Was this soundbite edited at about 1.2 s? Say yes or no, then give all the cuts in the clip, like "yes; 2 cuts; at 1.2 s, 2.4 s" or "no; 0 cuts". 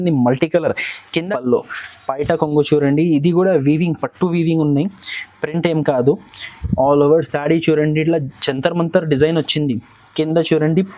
yes; 1 cut; at 1.2 s